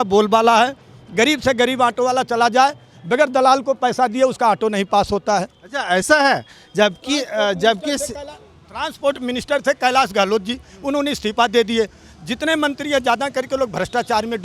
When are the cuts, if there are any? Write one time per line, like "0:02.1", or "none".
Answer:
none

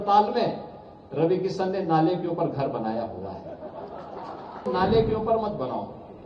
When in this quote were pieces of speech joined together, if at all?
0:04.7

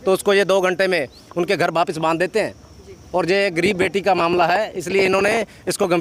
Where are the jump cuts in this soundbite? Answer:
none

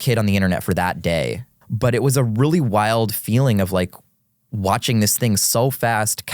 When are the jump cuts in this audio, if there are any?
0:01.5

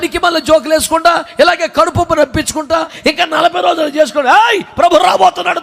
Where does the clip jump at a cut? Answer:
0:02.9

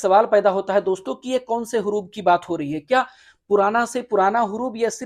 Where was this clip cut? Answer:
none

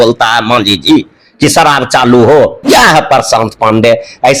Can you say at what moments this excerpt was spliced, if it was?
0:02.6

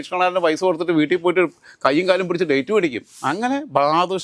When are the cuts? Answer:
0:03.1

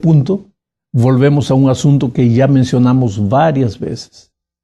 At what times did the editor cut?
none

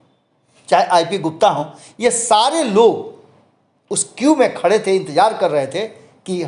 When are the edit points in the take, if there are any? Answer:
none

